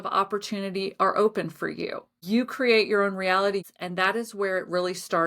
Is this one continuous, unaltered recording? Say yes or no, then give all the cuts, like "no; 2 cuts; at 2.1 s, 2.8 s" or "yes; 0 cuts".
no; 2 cuts; at 2.1 s, 3.7 s